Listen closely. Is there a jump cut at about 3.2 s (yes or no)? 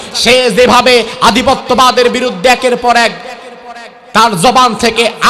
no